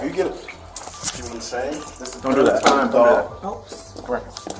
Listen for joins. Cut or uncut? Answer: uncut